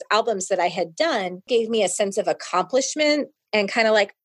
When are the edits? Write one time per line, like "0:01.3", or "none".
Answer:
0:01.4